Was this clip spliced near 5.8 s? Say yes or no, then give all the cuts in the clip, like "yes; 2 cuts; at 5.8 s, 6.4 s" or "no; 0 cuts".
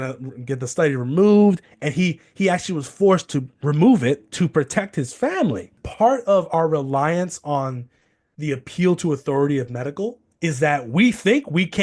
yes; 1 cut; at 5.8 s